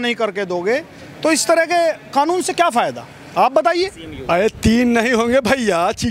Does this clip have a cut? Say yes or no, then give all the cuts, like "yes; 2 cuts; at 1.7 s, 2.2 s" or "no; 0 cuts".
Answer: yes; 1 cut; at 4.1 s